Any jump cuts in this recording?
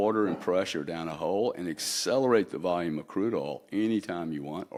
no; 0 cuts

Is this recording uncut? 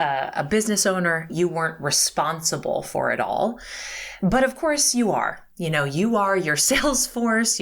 no; 1 cut; at 1.3 s

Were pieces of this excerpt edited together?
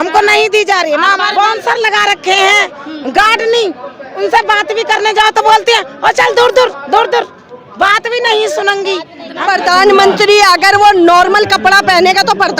yes; 2 cuts; at 1.3 s, 9.3 s

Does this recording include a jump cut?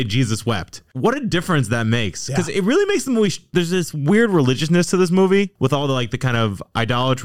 no; 0 cuts

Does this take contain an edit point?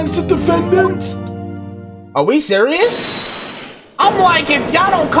no; 0 cuts

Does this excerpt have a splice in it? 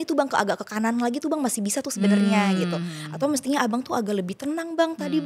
no; 0 cuts

